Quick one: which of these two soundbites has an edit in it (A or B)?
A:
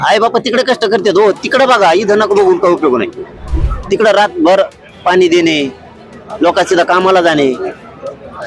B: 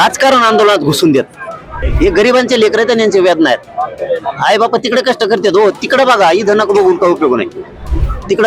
B